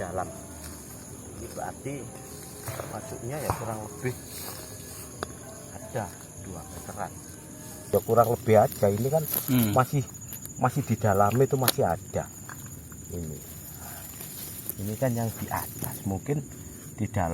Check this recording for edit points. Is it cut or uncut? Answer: cut